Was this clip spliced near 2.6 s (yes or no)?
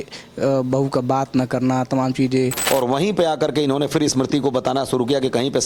yes